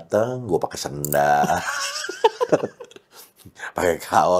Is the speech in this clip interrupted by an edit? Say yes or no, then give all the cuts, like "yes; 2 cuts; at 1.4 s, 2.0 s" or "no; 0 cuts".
no; 0 cuts